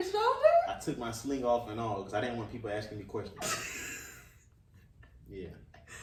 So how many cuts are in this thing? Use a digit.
0